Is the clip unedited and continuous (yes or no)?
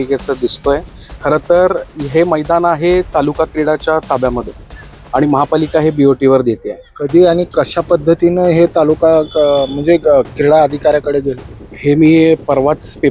yes